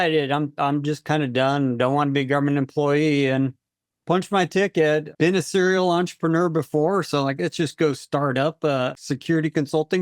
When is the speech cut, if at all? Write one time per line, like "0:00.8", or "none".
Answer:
0:09.0